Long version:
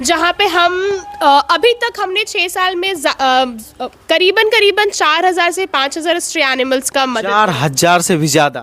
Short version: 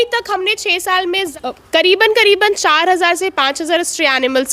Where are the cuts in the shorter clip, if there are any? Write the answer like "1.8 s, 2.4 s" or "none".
1.3 s